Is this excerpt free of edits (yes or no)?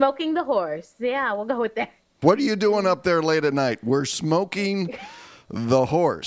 no